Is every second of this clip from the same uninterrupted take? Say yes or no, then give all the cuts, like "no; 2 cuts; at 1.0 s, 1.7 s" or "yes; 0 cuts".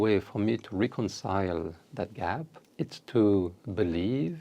no; 1 cut; at 2.6 s